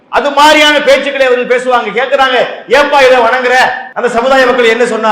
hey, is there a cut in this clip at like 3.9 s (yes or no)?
yes